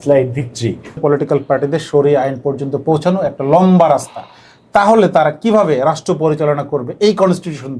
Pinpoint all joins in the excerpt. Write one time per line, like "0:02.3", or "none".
0:01.0